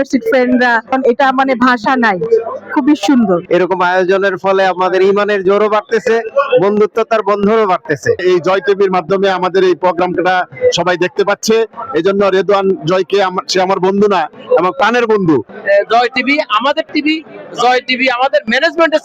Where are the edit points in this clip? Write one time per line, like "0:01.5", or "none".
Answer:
0:03.4
0:08.2
0:15.5